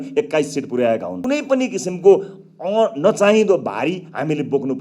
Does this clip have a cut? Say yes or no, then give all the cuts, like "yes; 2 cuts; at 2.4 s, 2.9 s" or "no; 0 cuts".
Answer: yes; 1 cut; at 1.1 s